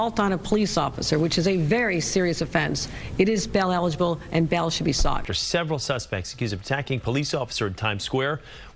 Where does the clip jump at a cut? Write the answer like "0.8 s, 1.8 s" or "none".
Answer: 5.3 s